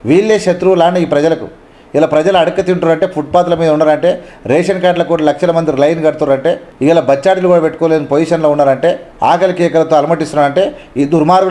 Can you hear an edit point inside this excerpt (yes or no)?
yes